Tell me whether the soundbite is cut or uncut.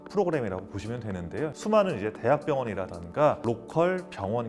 cut